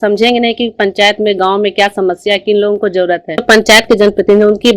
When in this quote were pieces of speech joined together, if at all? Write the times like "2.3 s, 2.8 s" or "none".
3.4 s